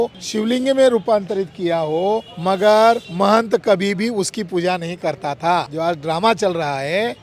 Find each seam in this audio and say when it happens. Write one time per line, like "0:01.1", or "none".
0:05.7